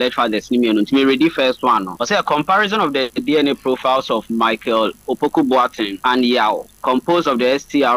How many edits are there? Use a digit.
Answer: 3